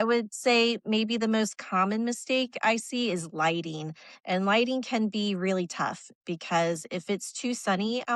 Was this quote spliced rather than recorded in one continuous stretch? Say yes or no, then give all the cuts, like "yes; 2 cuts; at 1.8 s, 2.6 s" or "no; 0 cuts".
no; 0 cuts